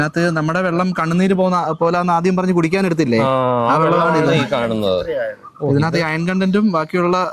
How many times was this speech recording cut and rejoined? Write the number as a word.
zero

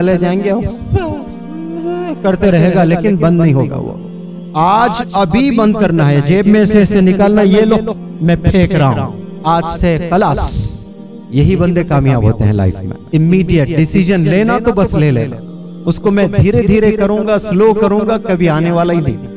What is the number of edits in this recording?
one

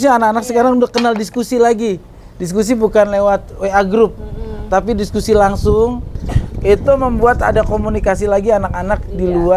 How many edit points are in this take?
one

